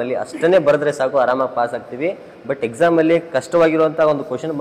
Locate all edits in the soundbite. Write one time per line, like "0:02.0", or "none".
none